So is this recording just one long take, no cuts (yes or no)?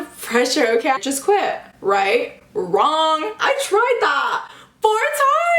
no